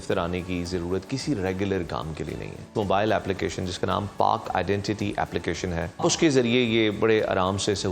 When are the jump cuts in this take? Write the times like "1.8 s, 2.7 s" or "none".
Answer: 2.7 s, 6.0 s